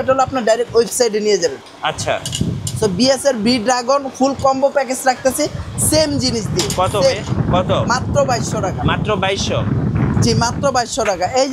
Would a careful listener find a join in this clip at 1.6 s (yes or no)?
no